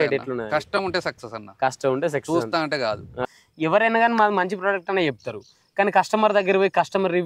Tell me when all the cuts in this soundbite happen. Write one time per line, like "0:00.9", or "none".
0:03.2